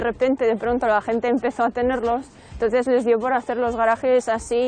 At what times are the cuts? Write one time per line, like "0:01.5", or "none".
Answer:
none